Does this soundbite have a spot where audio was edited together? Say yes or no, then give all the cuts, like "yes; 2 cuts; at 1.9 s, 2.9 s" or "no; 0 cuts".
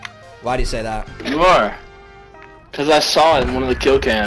no; 0 cuts